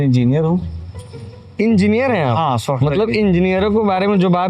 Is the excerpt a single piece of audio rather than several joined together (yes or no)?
yes